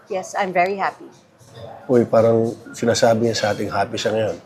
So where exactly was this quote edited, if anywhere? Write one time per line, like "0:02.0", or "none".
none